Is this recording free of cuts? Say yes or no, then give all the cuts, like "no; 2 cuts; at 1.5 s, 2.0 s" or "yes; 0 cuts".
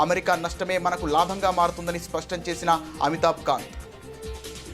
no; 1 cut; at 3.7 s